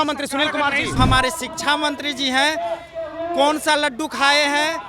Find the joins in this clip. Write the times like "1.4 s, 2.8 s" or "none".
1.0 s